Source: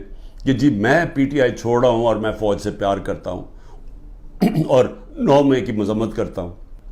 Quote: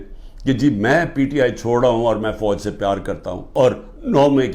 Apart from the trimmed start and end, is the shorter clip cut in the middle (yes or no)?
yes